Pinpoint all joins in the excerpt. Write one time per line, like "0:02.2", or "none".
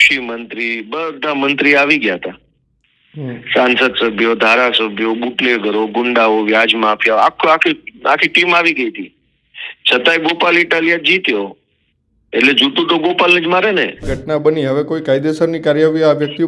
0:14.1